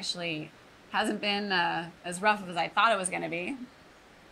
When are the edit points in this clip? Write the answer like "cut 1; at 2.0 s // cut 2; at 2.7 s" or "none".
none